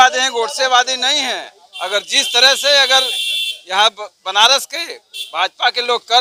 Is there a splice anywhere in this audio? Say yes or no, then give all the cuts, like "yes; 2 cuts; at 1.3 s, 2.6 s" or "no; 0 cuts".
no; 0 cuts